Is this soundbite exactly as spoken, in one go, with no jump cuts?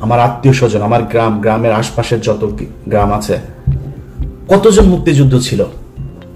yes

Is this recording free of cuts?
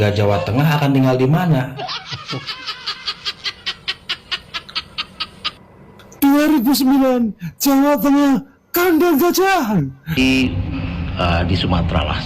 no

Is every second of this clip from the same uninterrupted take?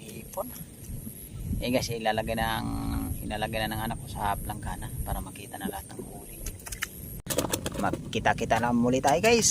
no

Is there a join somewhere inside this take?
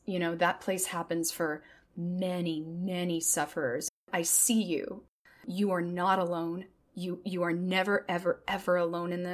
yes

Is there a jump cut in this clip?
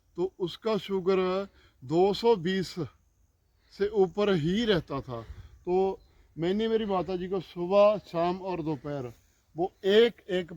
no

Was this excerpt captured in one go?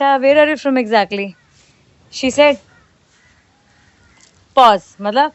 yes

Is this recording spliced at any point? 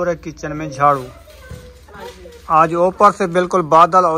no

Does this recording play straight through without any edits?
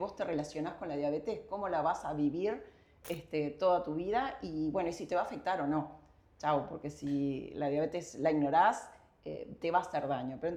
yes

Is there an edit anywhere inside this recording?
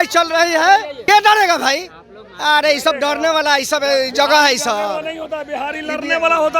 yes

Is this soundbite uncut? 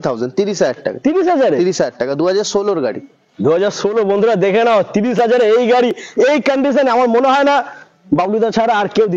yes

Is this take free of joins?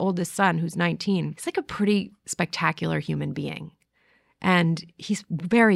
no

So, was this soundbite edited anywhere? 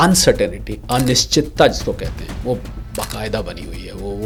no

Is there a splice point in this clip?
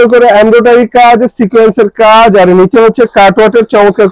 no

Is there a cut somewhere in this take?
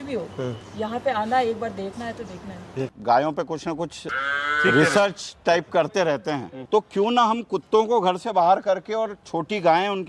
yes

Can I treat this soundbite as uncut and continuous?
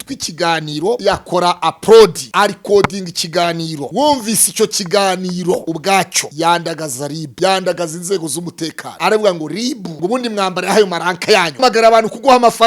no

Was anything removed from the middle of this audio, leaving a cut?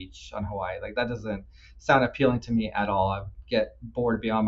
no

